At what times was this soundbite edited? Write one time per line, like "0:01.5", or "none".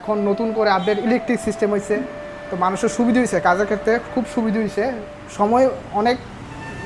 none

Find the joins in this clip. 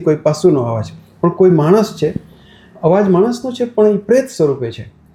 none

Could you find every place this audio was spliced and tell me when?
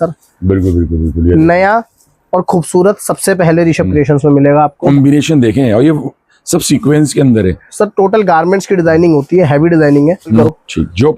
0:04.8
0:10.4

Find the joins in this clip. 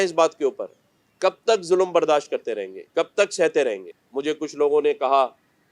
0:03.8

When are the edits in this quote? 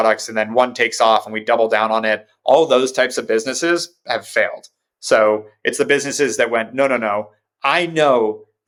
none

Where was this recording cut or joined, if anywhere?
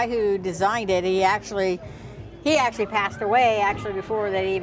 none

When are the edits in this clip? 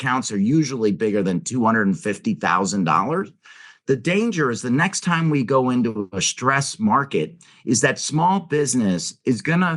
none

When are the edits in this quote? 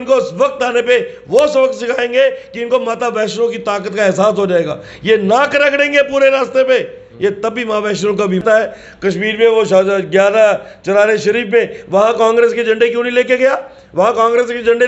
0:08.4

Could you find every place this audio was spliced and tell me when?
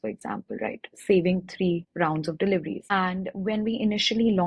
0:01.9
0:02.8

